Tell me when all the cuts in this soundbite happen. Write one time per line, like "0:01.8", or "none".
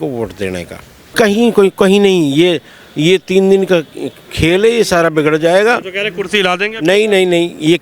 0:01.1